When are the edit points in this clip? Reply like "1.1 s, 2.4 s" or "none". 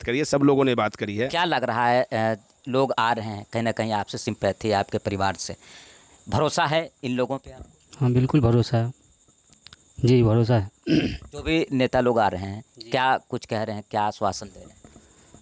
1.3 s